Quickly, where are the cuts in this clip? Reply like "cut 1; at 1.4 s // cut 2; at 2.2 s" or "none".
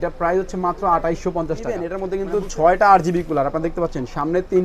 cut 1; at 1.9 s